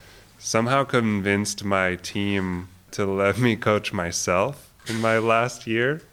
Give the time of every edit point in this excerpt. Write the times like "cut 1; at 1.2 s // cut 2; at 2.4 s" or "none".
cut 1; at 2.9 s